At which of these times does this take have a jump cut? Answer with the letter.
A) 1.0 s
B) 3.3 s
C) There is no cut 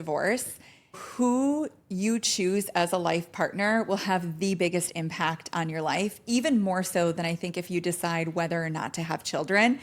A